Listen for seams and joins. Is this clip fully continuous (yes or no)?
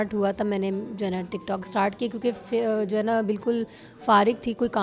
yes